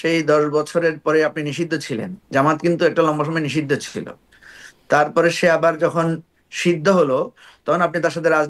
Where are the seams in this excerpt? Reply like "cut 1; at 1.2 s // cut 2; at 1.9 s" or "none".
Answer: none